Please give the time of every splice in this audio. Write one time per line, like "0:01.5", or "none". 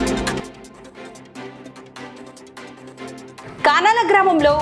0:02.4
0:03.4